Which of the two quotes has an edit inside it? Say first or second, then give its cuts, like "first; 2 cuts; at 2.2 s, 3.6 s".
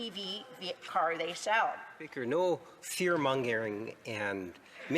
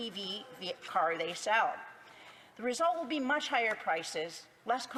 first; 1 cut; at 2.1 s